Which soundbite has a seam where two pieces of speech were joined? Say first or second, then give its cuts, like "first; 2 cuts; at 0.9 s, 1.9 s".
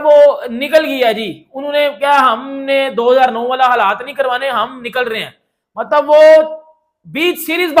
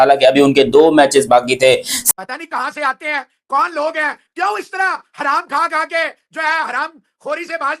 second; 1 cut; at 2.1 s